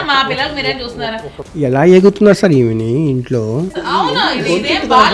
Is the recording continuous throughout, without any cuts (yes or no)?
yes